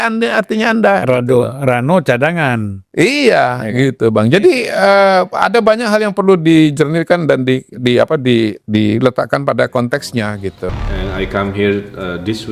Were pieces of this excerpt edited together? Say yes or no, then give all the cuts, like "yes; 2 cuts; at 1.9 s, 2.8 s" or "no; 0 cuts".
yes; 1 cut; at 10.6 s